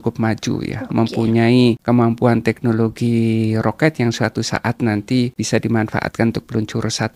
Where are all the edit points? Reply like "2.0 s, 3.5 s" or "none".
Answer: 1.8 s, 5.4 s